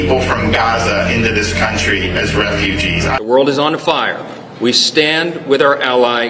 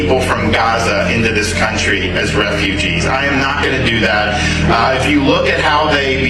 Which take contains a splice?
first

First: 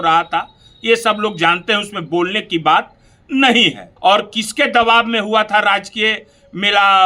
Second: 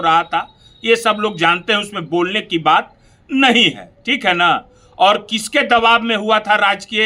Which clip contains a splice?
first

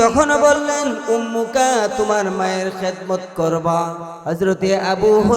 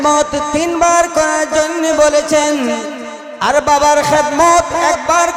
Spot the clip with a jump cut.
first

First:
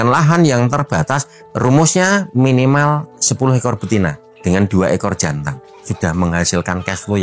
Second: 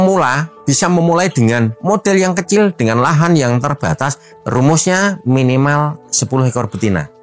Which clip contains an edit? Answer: first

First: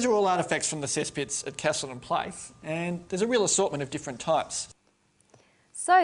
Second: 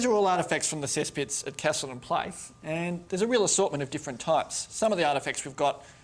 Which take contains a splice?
second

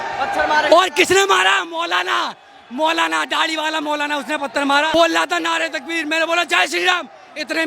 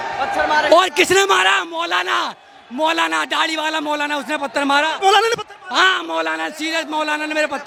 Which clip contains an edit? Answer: first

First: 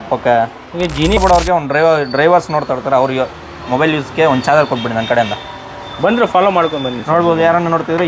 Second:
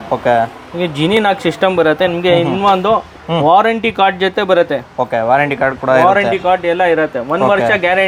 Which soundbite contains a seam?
first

